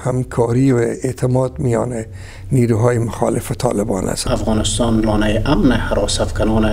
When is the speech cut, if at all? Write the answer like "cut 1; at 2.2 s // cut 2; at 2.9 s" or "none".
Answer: cut 1; at 4.2 s

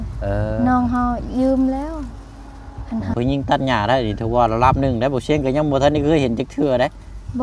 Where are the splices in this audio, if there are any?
cut 1; at 3.1 s

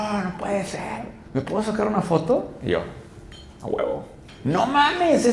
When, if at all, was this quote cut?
cut 1; at 1.2 s // cut 2; at 4.2 s

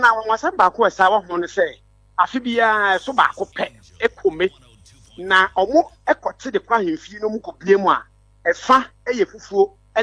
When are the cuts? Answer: none

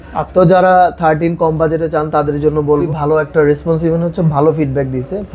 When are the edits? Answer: cut 1; at 2.8 s

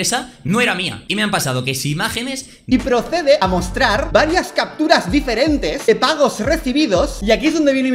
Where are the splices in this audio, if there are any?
cut 1; at 1.0 s // cut 2; at 2.6 s // cut 3; at 7.1 s

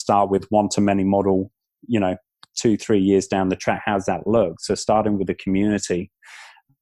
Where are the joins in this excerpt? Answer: none

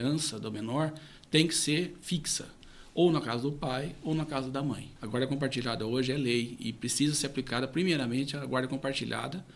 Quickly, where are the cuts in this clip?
cut 1; at 4.9 s

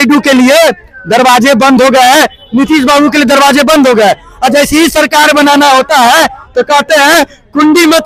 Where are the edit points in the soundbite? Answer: none

